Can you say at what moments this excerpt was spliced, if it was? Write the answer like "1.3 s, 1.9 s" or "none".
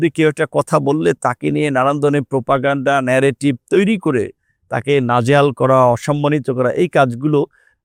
none